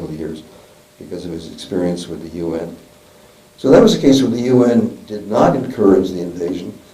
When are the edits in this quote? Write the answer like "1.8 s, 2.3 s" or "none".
1.4 s